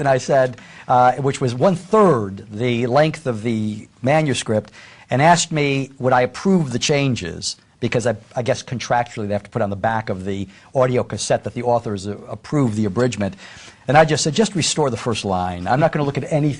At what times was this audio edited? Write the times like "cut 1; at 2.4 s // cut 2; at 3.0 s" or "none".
cut 1; at 10.1 s